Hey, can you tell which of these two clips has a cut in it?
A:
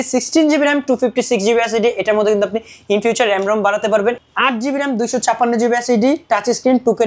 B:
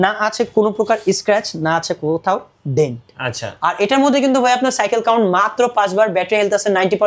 A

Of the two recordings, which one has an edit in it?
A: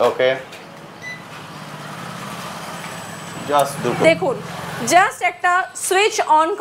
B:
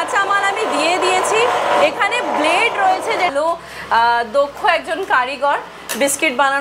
B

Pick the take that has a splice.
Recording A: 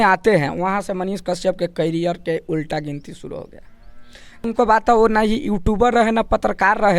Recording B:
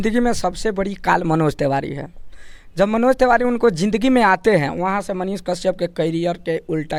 A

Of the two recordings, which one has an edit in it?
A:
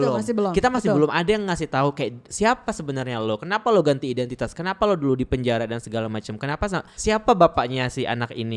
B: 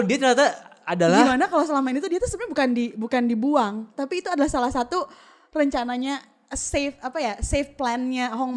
A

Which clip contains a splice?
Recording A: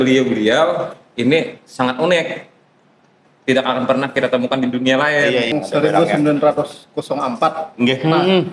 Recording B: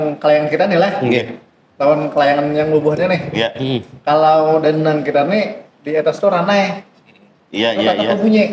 A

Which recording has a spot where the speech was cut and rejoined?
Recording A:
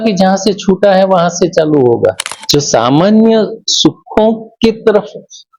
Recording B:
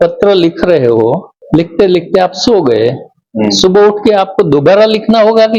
A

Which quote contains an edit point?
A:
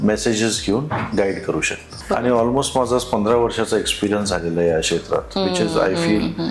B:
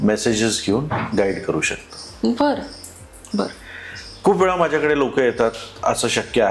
A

